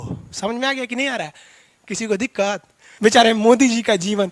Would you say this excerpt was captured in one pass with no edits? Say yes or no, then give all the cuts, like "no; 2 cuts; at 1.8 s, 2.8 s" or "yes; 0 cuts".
no; 1 cut; at 2.9 s